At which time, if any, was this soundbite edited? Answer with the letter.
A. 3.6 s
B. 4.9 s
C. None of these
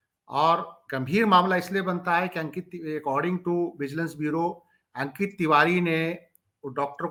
C